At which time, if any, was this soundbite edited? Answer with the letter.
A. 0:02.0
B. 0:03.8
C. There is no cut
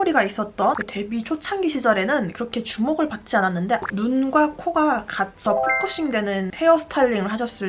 B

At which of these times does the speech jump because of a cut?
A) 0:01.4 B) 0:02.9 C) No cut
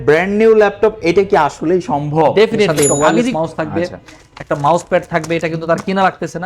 B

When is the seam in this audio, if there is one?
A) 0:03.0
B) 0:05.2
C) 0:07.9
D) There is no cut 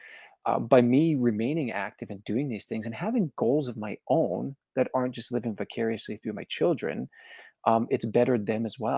D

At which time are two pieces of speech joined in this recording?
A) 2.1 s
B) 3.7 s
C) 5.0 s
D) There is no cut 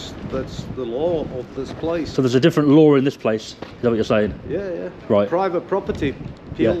A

